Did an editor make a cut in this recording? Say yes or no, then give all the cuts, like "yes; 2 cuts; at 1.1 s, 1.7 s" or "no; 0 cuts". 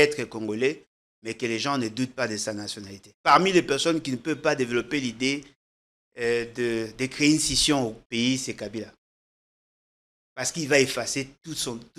yes; 1 cut; at 3.0 s